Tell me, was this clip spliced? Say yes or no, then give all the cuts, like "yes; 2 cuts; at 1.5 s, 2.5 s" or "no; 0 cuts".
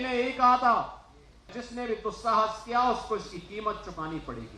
yes; 1 cut; at 1.6 s